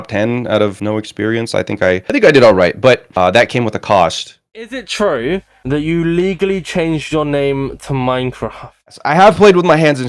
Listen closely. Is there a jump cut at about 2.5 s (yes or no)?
no